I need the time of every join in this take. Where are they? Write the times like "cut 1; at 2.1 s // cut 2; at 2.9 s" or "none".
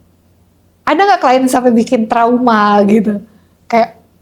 none